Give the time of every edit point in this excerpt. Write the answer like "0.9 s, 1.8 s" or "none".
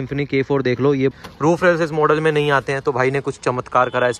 1.1 s